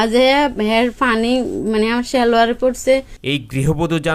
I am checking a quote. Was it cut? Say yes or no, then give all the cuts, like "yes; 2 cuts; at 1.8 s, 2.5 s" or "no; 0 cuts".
no; 0 cuts